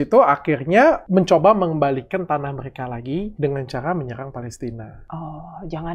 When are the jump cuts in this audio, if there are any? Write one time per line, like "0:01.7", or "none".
0:01.0
0:03.3
0:04.9